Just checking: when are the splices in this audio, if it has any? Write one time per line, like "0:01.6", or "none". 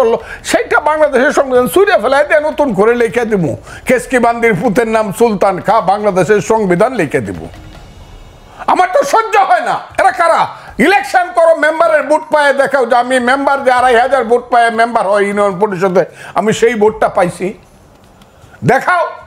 none